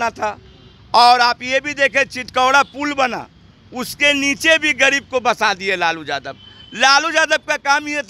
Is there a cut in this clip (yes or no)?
no